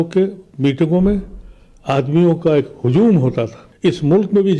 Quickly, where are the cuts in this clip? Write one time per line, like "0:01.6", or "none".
0:03.6